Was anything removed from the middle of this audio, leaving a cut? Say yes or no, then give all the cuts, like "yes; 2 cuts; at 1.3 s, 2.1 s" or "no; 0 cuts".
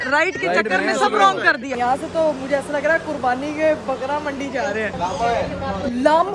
yes; 2 cuts; at 1.8 s, 4.9 s